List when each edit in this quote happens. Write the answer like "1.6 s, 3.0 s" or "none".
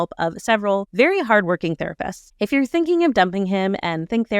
2.2 s